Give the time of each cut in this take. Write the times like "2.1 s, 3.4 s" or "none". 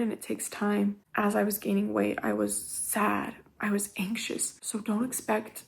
1.0 s, 4.6 s